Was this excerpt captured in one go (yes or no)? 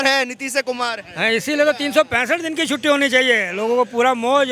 yes